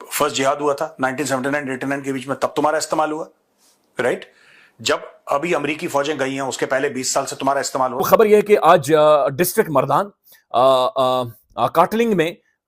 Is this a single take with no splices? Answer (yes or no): no